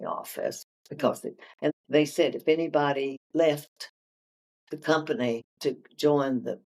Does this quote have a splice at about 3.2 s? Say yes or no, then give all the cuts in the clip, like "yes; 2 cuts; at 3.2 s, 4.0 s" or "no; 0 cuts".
yes; 3 cuts; at 1.7 s, 3.2 s, 5.5 s